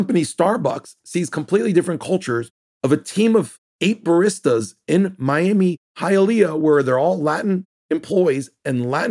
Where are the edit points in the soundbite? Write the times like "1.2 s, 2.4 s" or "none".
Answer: none